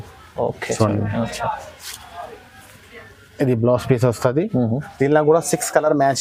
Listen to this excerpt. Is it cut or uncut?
uncut